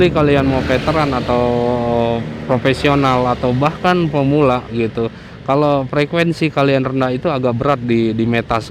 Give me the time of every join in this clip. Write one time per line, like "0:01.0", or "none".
none

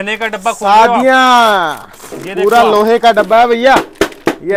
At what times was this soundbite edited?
none

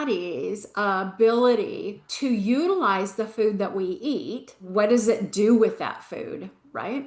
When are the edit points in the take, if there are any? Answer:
0:02.0
0:04.6

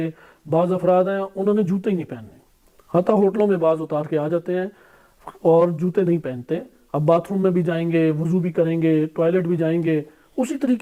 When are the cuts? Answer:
none

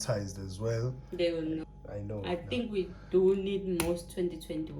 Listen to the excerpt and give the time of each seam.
0:01.7

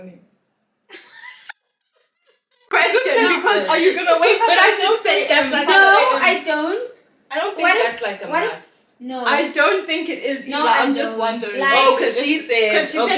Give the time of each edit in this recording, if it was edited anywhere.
none

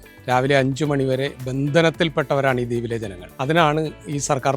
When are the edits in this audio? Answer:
0:01.4
0:03.2

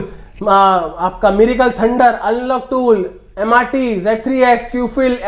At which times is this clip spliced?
none

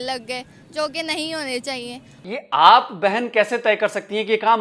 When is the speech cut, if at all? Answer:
0:02.2

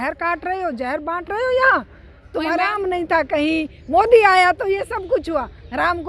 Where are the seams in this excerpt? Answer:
0:02.7

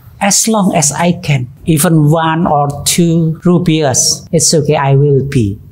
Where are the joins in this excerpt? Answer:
0:01.5
0:03.4
0:04.1

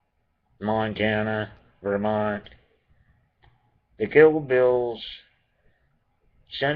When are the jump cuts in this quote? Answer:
none

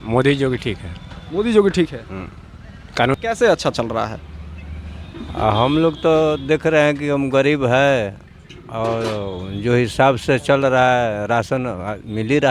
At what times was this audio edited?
0:03.1

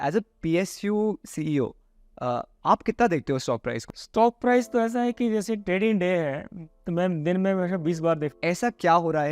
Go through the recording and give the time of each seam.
0:03.9
0:08.3

